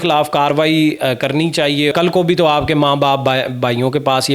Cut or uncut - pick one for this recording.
cut